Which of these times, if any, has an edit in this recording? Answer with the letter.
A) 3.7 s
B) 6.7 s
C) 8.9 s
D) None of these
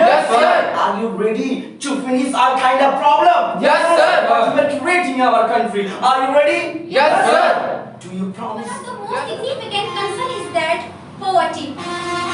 C